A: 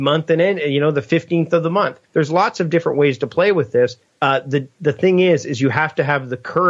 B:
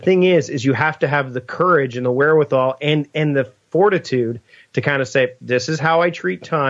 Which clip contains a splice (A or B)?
A